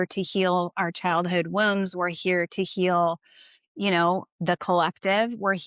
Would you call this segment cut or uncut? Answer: uncut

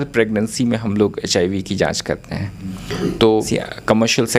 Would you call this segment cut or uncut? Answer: cut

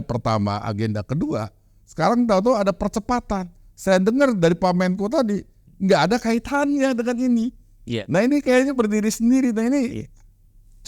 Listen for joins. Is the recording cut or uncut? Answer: uncut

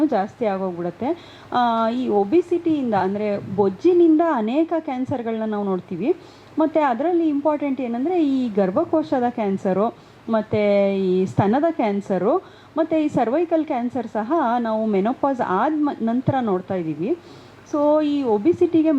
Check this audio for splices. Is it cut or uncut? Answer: uncut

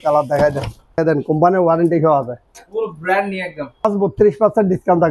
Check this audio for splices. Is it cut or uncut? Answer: cut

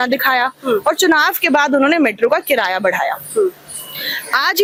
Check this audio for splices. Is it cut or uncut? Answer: uncut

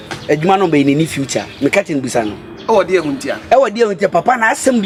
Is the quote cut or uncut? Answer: uncut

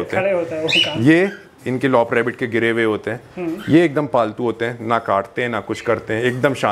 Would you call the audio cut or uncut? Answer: uncut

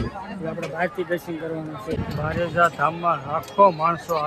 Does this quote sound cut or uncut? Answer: cut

